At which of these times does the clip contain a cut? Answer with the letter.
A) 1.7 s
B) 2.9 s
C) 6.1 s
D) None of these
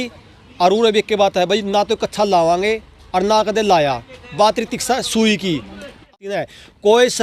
C